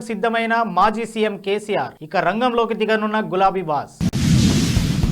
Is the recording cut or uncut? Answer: cut